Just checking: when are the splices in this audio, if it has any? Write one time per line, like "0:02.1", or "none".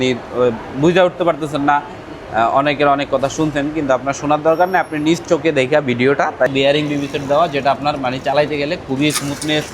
0:06.5